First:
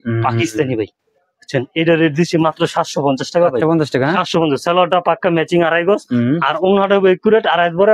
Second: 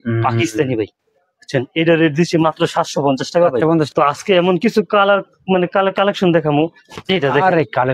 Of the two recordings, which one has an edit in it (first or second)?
second